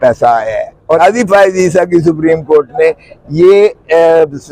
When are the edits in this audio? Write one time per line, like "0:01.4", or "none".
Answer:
0:01.0